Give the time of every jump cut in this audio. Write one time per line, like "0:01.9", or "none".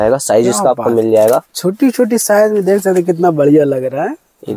none